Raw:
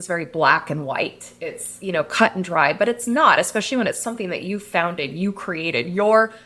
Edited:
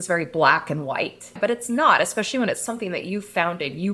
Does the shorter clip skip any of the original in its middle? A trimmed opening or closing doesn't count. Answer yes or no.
yes